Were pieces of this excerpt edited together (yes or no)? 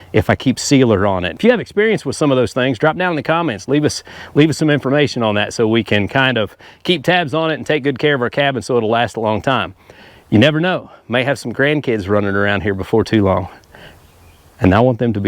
yes